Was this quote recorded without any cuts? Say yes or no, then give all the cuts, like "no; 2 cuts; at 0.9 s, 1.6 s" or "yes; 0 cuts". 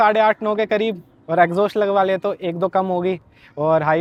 yes; 0 cuts